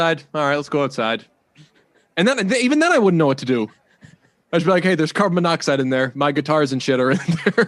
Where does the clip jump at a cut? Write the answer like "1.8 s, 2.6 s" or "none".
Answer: none